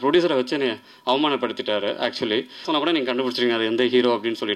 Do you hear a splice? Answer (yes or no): yes